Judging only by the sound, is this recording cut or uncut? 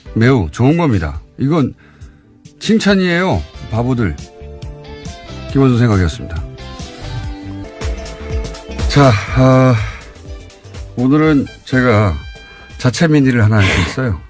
cut